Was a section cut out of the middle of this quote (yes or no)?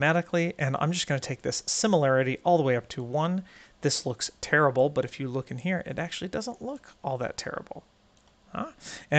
no